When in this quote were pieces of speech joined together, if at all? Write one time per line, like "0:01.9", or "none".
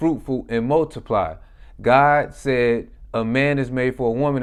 none